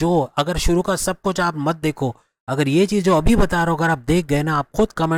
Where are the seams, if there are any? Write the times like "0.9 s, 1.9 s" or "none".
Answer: none